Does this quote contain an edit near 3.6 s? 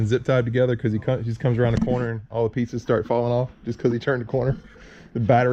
no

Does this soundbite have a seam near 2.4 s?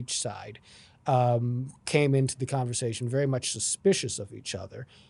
no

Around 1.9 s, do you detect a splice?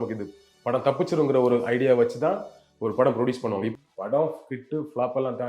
no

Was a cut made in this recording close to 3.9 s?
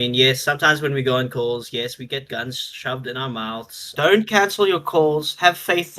yes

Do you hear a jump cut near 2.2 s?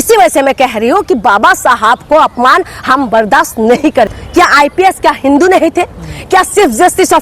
no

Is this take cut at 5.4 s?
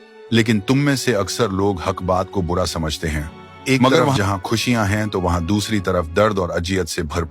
no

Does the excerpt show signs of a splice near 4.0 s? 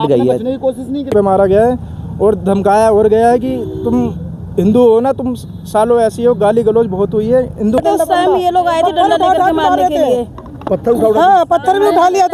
no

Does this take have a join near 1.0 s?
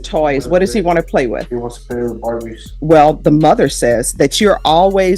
no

